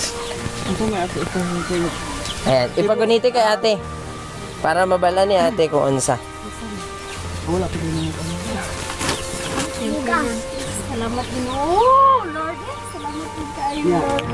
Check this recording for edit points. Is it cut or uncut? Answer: uncut